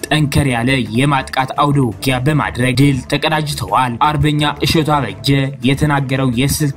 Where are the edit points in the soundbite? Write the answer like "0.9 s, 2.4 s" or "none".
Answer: 2.7 s, 3.9 s